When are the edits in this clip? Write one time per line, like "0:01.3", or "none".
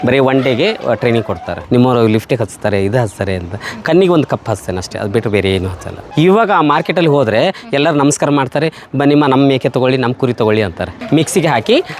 0:01.5
0:06.0
0:10.9